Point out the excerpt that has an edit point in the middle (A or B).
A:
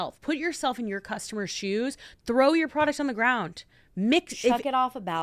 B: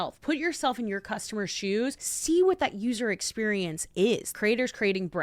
B